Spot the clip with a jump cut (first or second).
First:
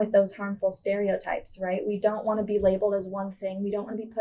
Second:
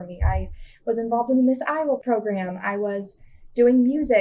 second